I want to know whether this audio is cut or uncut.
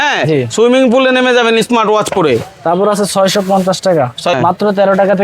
cut